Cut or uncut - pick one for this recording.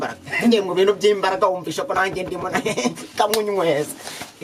uncut